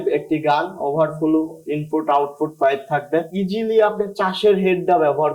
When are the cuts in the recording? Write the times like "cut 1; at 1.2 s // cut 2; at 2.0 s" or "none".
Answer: cut 1; at 3.3 s